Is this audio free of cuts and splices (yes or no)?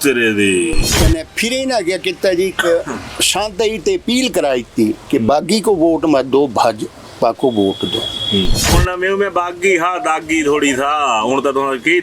no